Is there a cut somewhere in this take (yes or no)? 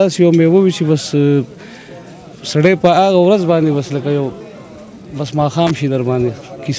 no